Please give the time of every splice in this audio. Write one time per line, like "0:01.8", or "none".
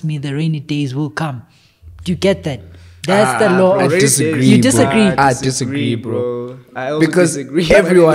none

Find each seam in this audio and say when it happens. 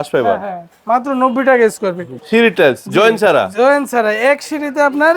0:02.1

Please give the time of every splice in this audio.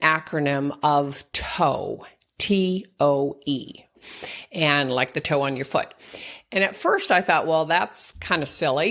none

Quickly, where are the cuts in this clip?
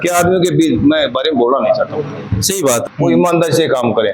0:02.8

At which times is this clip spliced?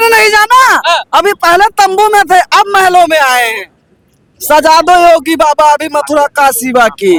none

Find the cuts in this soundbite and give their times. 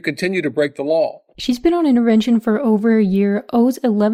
none

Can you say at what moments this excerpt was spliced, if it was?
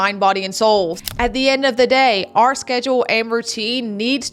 0:01.0

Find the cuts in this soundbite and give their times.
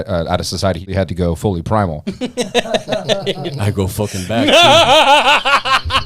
0:00.9

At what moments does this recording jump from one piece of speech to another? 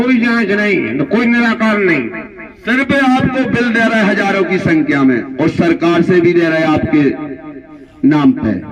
none

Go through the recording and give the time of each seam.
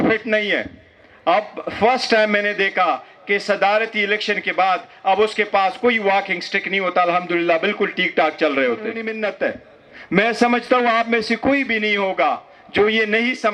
0:09.1

